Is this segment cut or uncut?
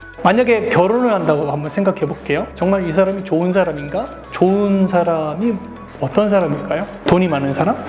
uncut